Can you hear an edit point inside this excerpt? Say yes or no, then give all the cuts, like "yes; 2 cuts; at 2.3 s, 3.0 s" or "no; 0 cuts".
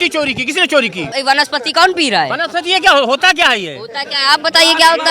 yes; 1 cut; at 1.1 s